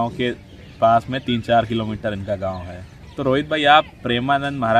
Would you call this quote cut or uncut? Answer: uncut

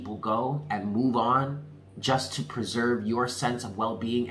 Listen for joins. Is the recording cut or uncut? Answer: uncut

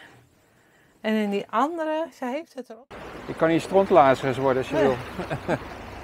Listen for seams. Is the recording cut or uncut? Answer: cut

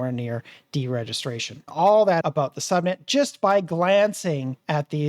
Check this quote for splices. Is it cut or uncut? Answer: cut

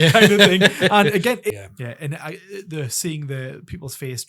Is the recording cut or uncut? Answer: cut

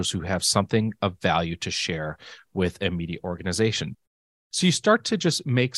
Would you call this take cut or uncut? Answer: cut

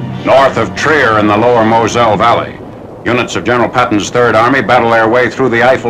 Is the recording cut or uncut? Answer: uncut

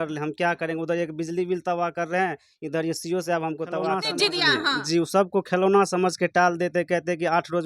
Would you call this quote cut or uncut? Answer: cut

